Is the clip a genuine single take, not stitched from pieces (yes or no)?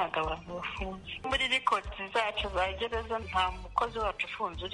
no